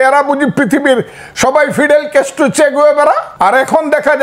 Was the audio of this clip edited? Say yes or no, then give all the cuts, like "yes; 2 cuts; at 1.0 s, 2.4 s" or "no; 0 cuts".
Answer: yes; 1 cut; at 3.3 s